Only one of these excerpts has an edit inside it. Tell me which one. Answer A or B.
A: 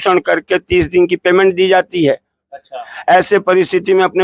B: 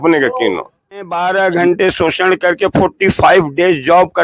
B